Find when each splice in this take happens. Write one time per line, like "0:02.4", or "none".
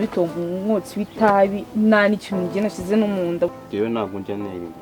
0:03.5